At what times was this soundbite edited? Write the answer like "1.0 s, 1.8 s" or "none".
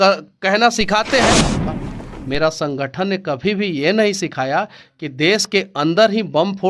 1.6 s